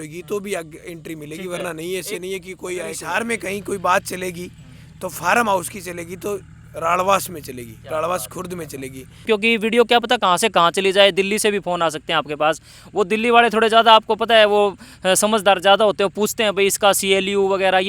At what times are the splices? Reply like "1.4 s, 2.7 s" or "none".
3.0 s, 9.3 s